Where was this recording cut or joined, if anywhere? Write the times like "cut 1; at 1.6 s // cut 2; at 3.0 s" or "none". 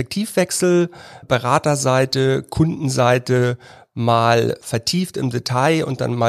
cut 1; at 1.2 s // cut 2; at 4.6 s